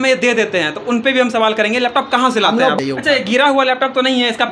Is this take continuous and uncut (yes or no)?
no